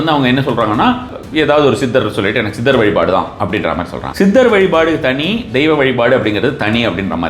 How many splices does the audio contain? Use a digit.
2